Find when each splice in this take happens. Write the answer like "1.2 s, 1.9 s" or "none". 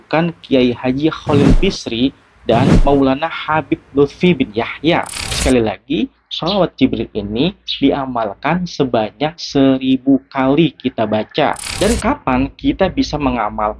5.2 s